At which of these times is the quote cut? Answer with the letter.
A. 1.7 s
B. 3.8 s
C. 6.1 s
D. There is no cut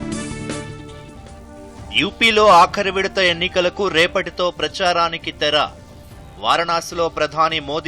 A